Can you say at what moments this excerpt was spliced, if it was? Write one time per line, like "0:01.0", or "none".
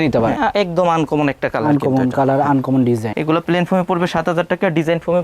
0:03.1